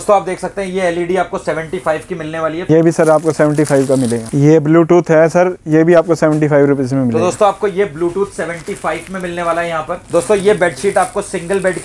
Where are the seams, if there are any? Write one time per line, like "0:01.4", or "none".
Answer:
0:02.7
0:04.2
0:10.0